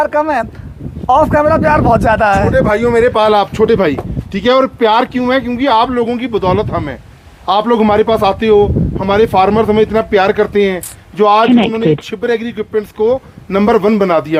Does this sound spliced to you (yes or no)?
no